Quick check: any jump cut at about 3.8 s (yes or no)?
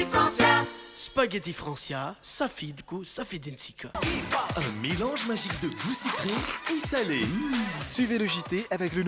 no